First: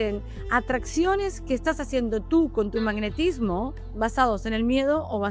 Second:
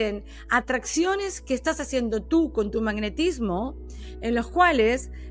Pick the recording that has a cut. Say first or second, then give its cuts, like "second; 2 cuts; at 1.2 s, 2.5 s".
first; 1 cut; at 3.9 s